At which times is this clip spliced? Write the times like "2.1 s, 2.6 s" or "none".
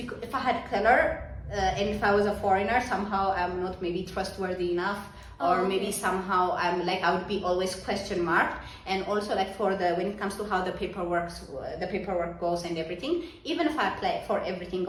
none